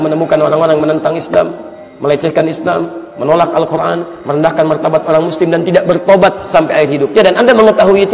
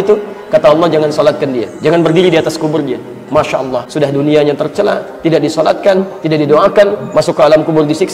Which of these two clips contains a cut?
second; 2 cuts; at 1.7 s, 3.9 s

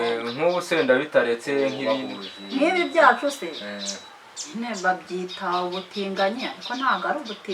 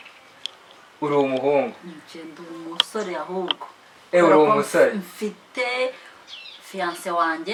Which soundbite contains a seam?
first; 1 cut; at 1.8 s

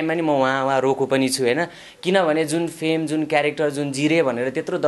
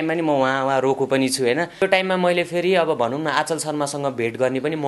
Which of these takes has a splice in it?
second; 1 cut; at 1.8 s

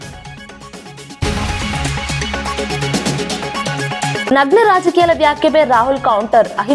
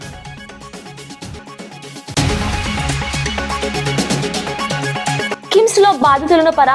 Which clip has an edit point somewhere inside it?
first; 2 cuts; at 1.2 s, 3.8 s

